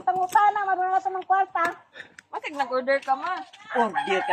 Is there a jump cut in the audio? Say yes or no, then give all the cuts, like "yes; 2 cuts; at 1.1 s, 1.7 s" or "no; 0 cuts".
no; 0 cuts